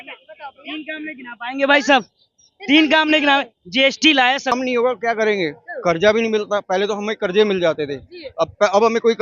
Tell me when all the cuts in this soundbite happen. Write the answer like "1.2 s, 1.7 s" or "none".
4.5 s